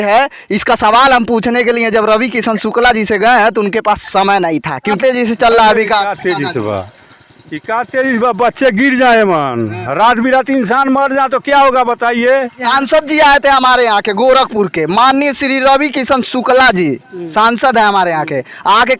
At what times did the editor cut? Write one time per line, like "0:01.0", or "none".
0:05.0
0:12.6

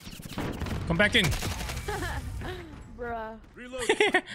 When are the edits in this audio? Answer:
none

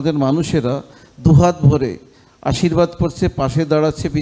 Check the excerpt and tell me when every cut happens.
none

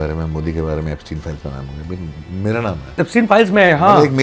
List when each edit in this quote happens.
0:03.0

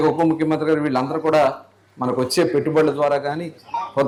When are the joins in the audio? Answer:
none

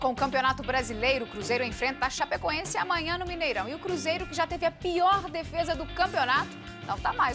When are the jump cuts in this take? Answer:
none

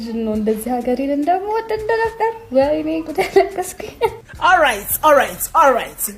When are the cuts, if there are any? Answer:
0:04.2

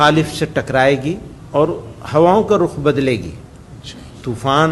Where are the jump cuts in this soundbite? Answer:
0:01.3

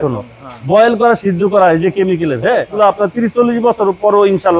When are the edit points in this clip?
0:02.7

